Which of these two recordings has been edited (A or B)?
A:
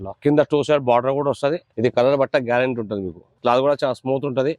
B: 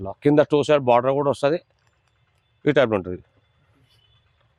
A